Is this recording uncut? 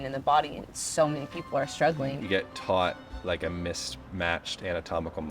no; 1 cut; at 2.2 s

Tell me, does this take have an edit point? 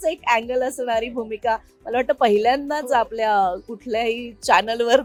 no; 0 cuts

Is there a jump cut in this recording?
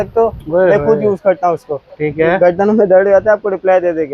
no; 0 cuts

